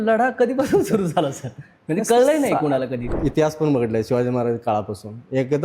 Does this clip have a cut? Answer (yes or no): yes